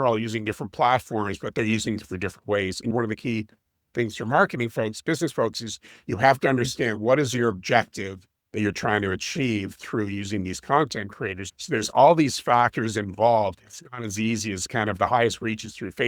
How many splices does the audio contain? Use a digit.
2